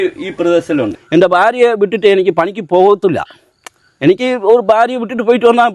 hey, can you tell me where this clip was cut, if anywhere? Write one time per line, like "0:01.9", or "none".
0:01.0